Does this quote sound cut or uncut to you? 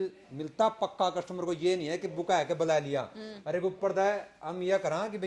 uncut